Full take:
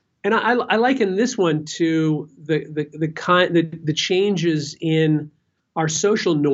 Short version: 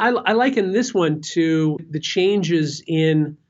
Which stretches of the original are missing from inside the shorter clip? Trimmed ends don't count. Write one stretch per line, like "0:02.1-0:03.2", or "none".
0:02.3-0:03.8